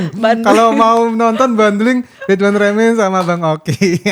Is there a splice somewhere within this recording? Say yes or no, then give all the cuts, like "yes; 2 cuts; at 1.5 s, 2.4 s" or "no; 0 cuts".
no; 0 cuts